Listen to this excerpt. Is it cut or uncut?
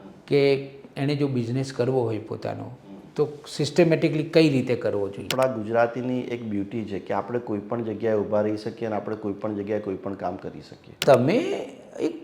cut